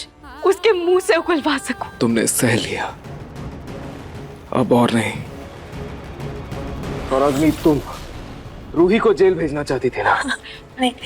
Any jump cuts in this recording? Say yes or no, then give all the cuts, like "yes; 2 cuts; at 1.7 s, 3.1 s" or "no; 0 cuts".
yes; 2 cuts; at 1.9 s, 7.0 s